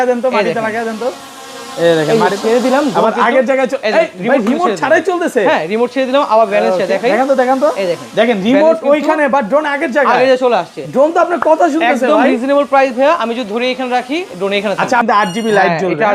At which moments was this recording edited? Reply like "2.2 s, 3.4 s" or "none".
15.0 s